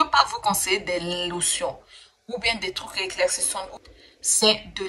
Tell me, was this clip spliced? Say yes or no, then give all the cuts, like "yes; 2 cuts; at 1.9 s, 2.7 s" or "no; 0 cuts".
yes; 1 cut; at 3.8 s